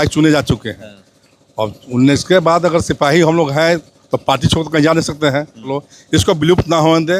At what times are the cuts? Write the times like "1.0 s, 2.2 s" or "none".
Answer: 5.8 s